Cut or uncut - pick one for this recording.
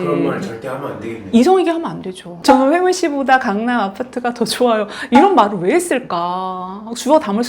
cut